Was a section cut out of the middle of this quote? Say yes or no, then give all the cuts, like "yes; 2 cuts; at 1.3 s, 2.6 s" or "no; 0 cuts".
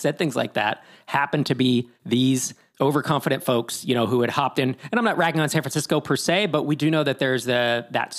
yes; 1 cut; at 1.9 s